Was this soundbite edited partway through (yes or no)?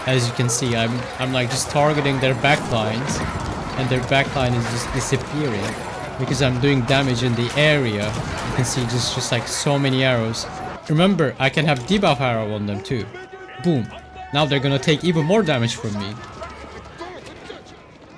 yes